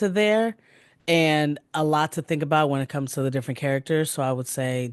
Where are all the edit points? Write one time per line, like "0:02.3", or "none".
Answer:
none